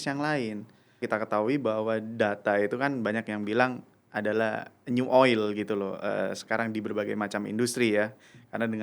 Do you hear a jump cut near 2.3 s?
no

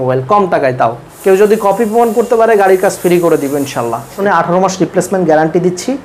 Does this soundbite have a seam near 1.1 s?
yes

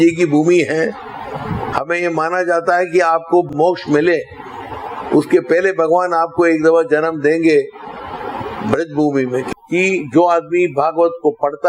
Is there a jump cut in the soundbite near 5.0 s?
no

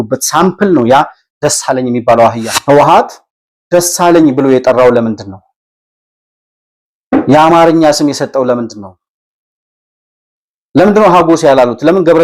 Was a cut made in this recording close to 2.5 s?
yes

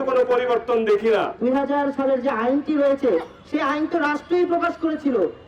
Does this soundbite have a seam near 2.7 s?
no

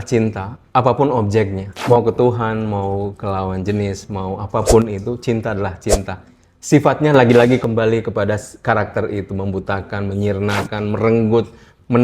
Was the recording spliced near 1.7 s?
yes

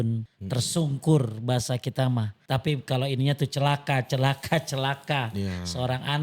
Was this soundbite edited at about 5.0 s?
no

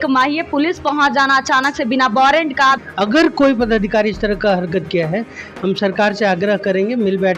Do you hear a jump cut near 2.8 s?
yes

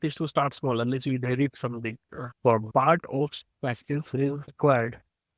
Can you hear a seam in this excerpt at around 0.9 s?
no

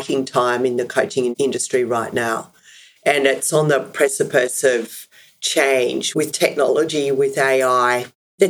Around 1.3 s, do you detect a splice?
yes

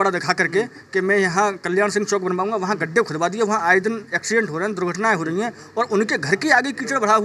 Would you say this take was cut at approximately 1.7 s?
no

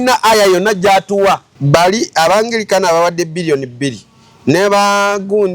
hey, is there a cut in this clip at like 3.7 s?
no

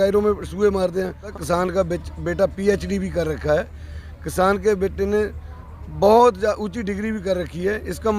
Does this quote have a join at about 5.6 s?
no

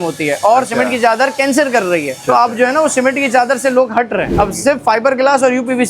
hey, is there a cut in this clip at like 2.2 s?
yes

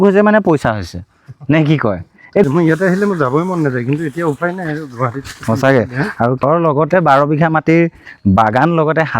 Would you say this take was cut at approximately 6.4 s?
yes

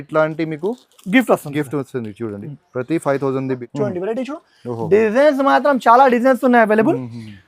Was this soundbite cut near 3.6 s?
yes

